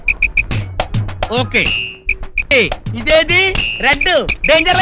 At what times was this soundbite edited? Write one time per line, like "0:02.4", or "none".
0:02.5